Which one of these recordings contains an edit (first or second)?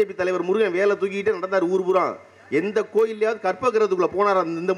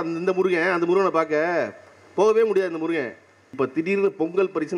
second